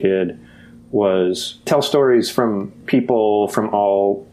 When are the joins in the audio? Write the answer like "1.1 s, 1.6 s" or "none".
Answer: 1.7 s, 2.8 s